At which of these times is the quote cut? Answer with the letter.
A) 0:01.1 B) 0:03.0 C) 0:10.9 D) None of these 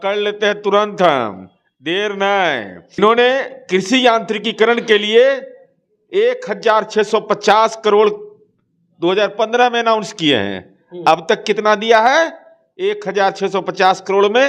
B